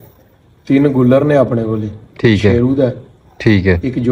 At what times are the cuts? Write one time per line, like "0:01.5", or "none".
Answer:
none